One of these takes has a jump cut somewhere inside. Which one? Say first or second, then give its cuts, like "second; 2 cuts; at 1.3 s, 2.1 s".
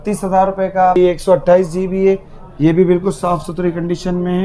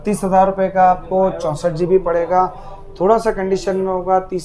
first; 1 cut; at 1.0 s